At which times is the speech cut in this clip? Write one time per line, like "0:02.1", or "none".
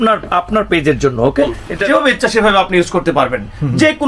0:01.9